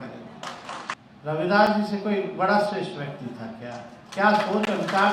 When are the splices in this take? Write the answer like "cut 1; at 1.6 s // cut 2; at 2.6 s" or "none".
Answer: cut 1; at 1.0 s